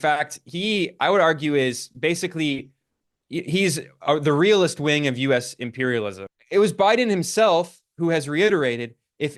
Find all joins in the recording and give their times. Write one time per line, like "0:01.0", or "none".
0:06.2